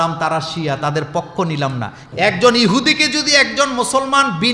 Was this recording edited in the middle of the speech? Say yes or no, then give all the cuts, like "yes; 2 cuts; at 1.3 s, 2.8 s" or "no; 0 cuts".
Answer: yes; 1 cut; at 2.0 s